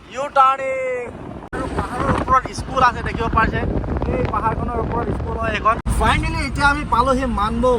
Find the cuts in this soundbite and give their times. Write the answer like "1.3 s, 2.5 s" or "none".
1.6 s, 5.9 s